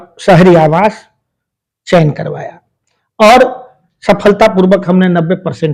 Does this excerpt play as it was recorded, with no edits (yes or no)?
yes